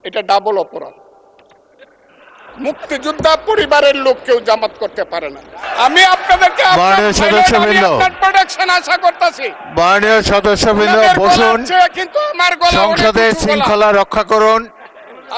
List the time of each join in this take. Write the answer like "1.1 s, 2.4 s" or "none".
5.6 s